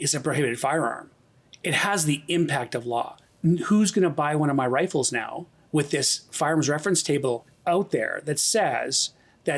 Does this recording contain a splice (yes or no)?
yes